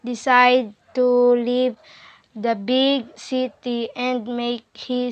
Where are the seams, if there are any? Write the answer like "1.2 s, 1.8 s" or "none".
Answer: 4.1 s